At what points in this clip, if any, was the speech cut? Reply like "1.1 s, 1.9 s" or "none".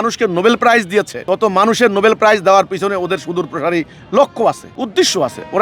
1.2 s, 4.7 s